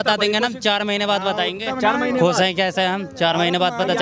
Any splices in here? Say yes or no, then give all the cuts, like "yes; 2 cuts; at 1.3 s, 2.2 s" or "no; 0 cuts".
no; 0 cuts